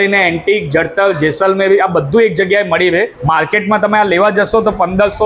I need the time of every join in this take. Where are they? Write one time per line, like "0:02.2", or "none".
0:03.1